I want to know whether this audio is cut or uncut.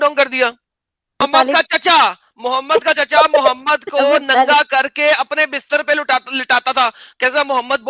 cut